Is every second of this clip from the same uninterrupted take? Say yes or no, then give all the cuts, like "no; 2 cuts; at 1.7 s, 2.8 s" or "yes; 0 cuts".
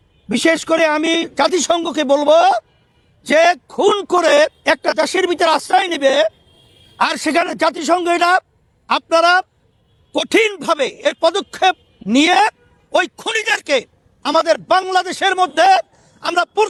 yes; 0 cuts